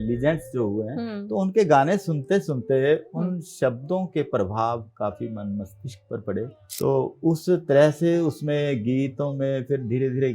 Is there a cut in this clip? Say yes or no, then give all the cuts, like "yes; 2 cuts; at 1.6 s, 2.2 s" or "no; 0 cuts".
yes; 1 cut; at 6.6 s